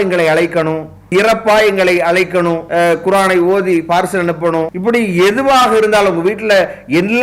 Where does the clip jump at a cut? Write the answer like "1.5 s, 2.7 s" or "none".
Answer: 1.1 s, 2.6 s, 4.7 s